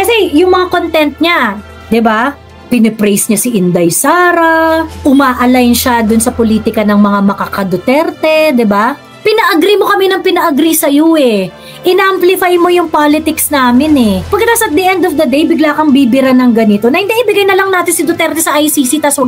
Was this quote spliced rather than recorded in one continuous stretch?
yes; 1 cut; at 14.3 s

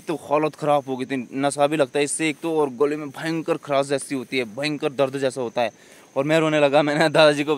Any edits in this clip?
no; 0 cuts

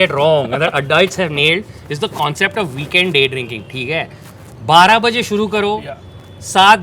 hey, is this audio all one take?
yes; 0 cuts

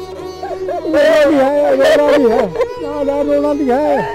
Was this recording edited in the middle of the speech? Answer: no; 0 cuts

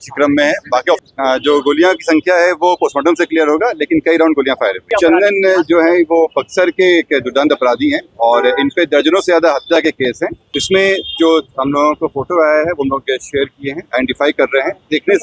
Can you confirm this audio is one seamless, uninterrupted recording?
no; 3 cuts; at 1.0 s, 4.9 s, 10.6 s

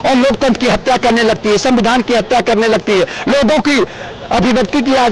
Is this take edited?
no; 0 cuts

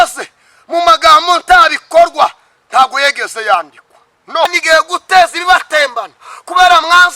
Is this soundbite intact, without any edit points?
no; 1 cut; at 4.5 s

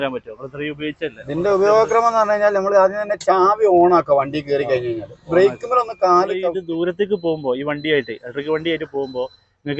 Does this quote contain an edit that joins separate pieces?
yes; 1 cut; at 6.6 s

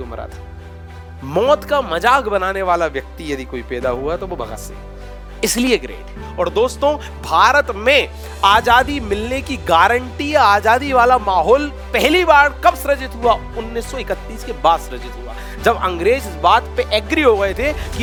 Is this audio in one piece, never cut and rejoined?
yes; 0 cuts

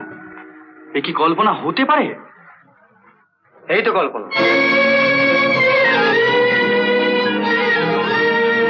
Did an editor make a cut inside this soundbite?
no; 0 cuts

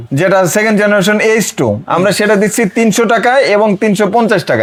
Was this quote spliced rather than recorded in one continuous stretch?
no; 0 cuts

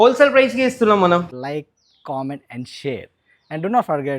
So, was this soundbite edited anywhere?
yes; 1 cut; at 1.3 s

